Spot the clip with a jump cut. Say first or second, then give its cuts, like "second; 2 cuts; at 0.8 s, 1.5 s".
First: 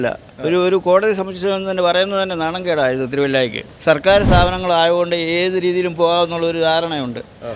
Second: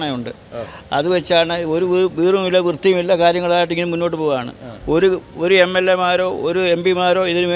first; 1 cut; at 3.7 s